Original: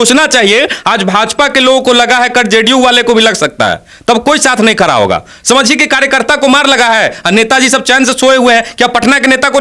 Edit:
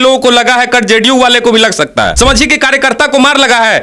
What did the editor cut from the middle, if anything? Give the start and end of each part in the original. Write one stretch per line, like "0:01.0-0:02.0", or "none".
0:03.7-0:05.4

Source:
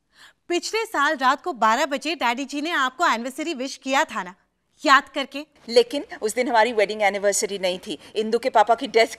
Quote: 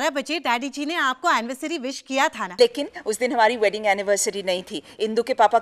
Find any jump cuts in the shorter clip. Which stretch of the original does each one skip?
0:04.2-0:05.6

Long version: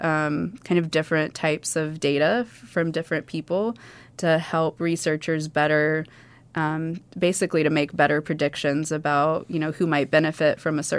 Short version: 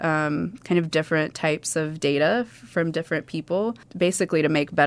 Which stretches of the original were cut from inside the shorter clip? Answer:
0:03.9-0:07.1

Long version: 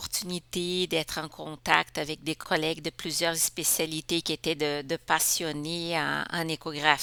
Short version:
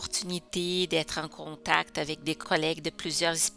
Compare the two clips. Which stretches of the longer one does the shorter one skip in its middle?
none

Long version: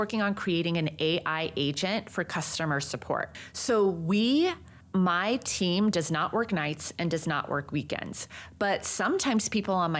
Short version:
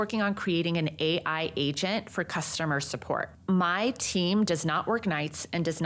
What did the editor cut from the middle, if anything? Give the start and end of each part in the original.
0:03.3-0:04.8

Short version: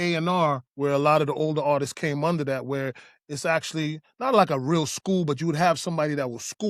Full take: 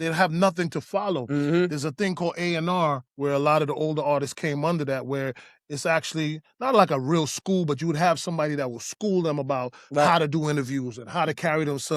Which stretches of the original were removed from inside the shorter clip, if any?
none

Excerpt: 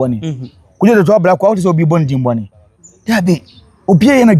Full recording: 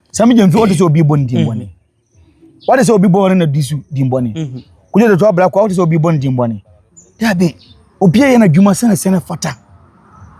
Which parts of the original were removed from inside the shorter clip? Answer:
none

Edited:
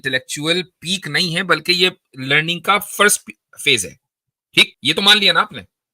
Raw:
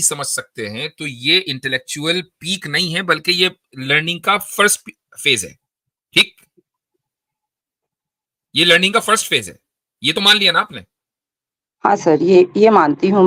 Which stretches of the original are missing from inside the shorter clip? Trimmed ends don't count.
0:06.3-0:09.9

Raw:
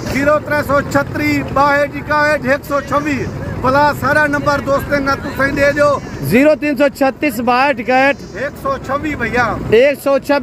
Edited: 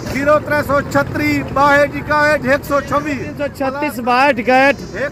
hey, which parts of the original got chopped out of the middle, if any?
0:03.5-0:06.9

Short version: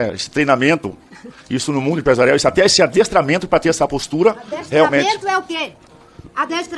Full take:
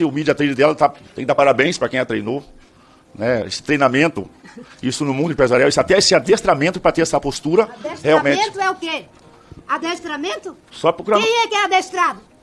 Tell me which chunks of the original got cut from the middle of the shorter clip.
none

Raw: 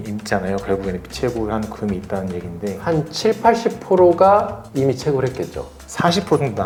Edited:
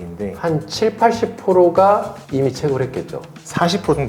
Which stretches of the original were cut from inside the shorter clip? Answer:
none

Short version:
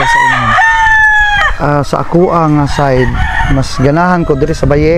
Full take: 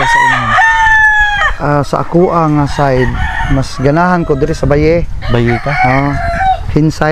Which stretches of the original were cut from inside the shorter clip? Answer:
none

